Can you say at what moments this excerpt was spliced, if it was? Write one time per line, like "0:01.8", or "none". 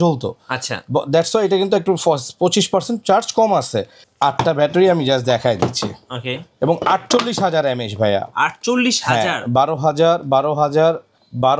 0:04.0